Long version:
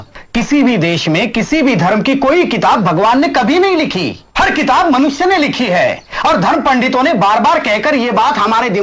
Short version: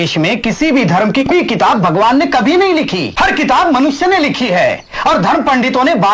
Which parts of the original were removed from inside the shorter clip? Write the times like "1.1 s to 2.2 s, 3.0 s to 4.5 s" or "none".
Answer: 2.2 s to 2.3 s, 4.1 s to 4.2 s

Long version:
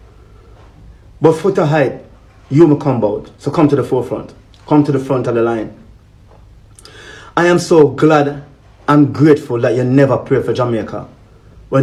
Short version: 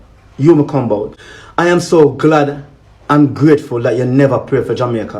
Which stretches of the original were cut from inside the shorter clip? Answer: 3.3 s to 7.0 s

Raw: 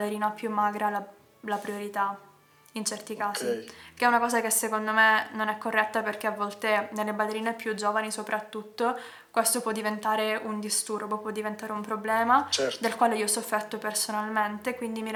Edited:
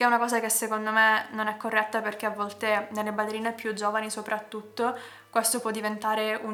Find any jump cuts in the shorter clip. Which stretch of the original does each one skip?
none

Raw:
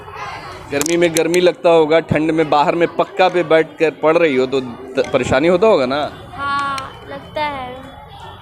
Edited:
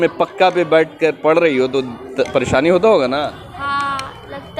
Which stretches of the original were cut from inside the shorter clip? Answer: none

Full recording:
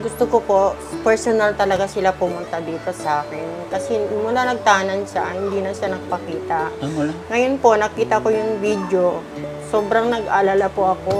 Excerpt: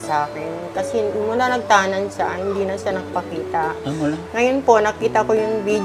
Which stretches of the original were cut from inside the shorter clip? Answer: none

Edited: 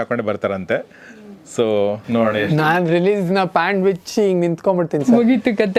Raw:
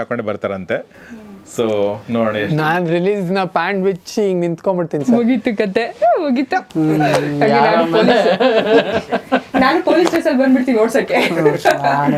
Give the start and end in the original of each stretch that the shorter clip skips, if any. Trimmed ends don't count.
none

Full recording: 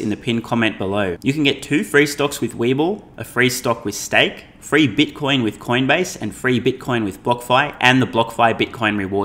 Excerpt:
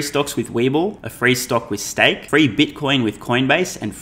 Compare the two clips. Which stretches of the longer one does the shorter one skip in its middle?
3.1 s to 3.2 s, 4.4 s to 4.6 s

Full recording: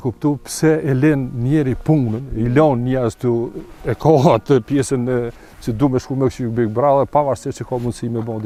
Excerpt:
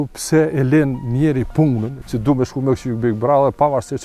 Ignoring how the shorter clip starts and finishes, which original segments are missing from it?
2.2 s to 5.5 s

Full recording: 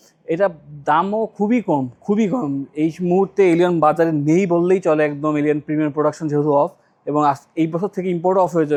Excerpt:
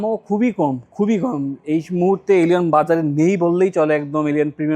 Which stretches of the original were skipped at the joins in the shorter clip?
none

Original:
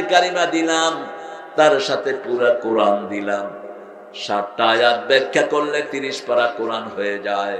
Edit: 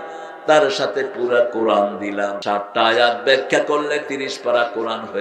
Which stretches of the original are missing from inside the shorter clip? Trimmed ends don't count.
3.5 s to 4.2 s

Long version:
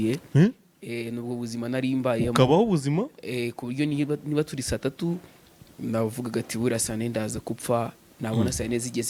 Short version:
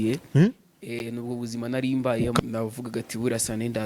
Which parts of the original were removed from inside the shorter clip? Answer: 2.4 s to 5.8 s

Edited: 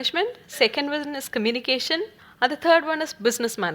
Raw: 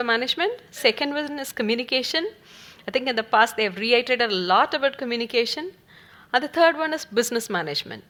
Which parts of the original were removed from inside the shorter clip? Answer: 2.4 s to 6.1 s

